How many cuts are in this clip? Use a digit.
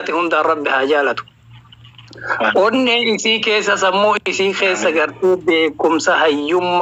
0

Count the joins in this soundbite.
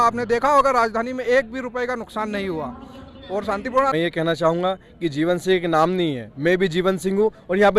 1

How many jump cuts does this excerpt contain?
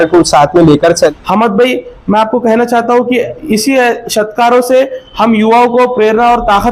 1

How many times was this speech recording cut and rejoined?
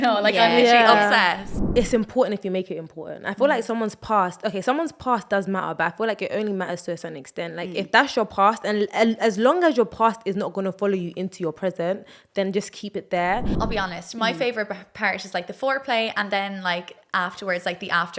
2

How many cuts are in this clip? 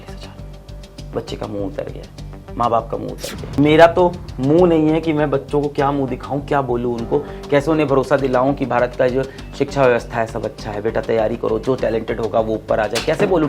1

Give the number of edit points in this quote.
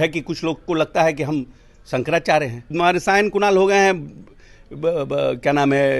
1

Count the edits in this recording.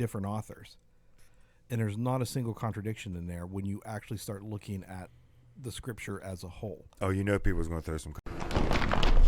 1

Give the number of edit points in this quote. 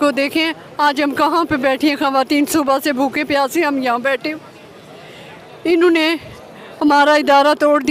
0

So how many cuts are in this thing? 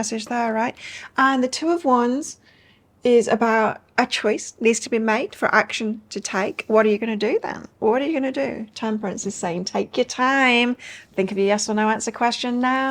1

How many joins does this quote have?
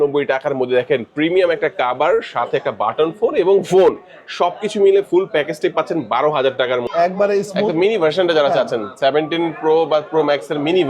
1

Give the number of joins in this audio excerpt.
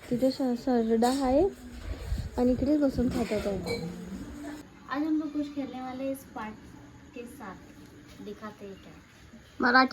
1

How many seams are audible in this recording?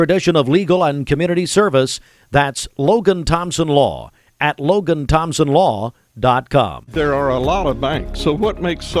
1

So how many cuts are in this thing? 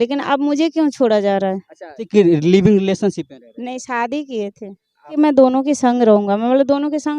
2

